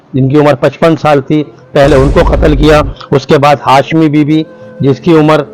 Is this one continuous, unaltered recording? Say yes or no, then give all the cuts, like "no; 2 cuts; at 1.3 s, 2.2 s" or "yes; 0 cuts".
yes; 0 cuts